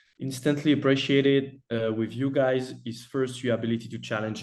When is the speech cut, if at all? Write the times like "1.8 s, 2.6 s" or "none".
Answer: none

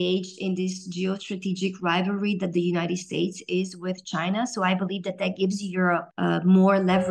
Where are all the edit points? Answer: 6.1 s

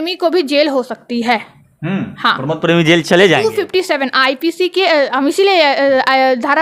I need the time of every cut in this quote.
none

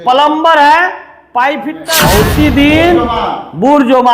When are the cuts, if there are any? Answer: 2.0 s

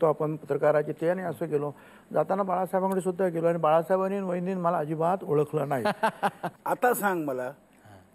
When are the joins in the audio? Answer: 6.5 s

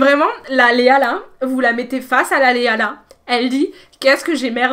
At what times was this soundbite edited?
none

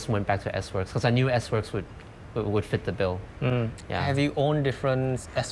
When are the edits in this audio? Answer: none

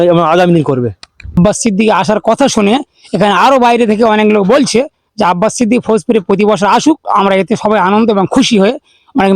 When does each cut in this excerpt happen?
1.4 s

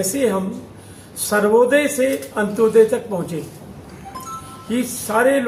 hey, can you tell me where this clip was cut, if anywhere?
none

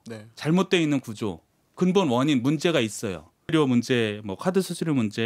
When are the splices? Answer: 3.5 s

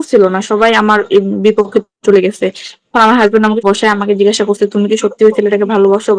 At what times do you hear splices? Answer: 3.6 s

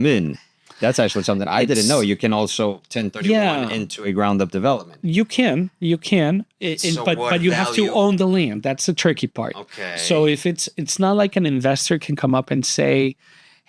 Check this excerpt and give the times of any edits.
none

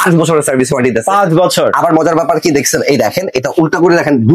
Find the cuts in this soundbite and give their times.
none

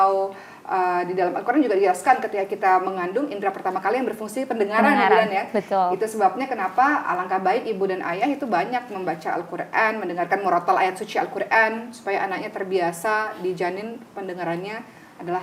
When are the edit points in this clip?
none

